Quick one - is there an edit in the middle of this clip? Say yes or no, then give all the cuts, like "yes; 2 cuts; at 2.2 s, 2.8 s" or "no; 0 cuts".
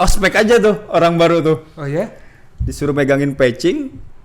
no; 0 cuts